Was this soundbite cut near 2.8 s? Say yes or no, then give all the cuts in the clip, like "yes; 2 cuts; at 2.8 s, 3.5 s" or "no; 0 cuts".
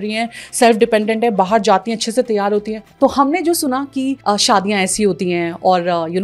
yes; 1 cut; at 2.8 s